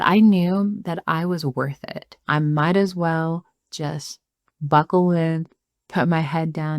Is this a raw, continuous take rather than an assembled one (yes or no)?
no